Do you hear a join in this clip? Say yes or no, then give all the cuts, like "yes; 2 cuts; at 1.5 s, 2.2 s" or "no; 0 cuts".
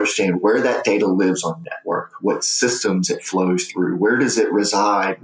no; 0 cuts